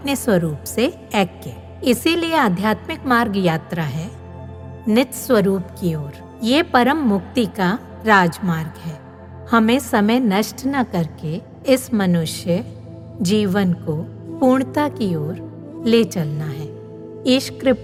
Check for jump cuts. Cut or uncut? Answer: uncut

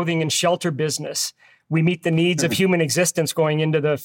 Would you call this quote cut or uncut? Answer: uncut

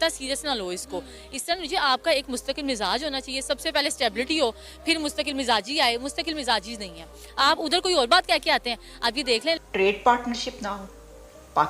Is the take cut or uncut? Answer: cut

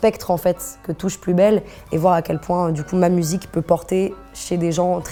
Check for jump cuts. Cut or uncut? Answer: uncut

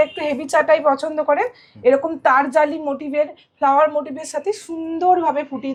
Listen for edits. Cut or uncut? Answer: uncut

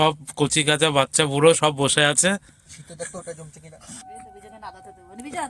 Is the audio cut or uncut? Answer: cut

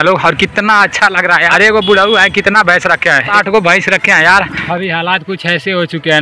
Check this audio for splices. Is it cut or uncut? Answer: cut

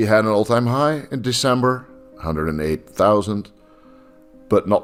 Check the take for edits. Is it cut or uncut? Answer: uncut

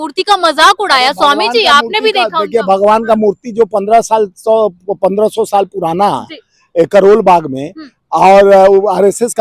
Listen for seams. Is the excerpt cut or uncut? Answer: uncut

